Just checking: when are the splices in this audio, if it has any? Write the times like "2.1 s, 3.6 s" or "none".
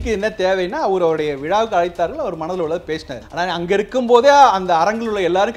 3.2 s